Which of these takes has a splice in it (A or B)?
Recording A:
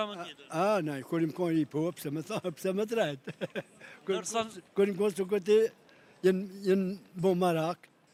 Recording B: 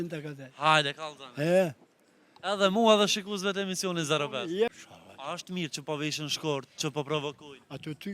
B